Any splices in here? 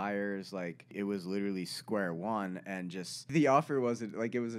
yes; 2 cuts; at 0.9 s, 3.3 s

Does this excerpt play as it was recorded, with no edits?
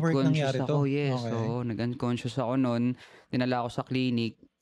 yes; 0 cuts

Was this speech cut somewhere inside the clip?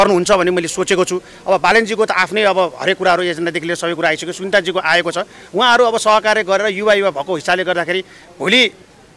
no; 0 cuts

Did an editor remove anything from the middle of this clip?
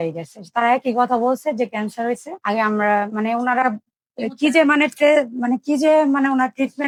no; 0 cuts

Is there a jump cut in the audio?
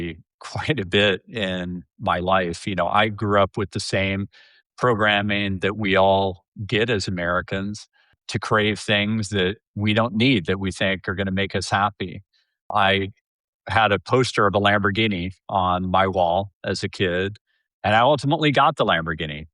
yes; 2 cuts; at 8.2 s, 12.7 s

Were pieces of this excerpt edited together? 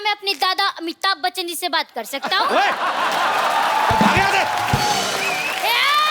no; 0 cuts

